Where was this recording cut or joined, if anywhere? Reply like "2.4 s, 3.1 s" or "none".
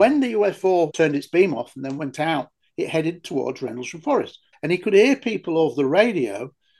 0.9 s, 4.4 s